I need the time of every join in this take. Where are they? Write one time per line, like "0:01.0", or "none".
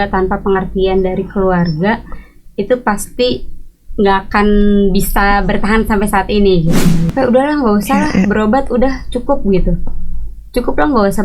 0:07.1

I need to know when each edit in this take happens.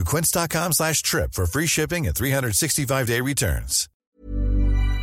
0:04.1

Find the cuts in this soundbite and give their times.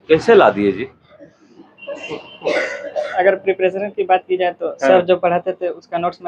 none

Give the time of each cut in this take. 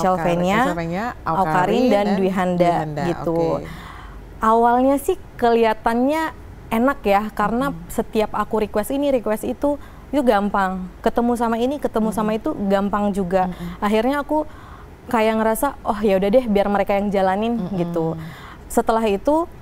none

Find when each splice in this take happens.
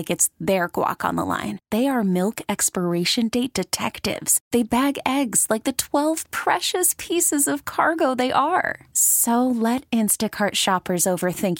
none

